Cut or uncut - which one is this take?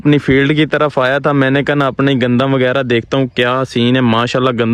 uncut